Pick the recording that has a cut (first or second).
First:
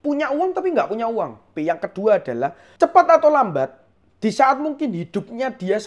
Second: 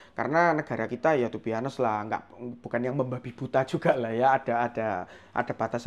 first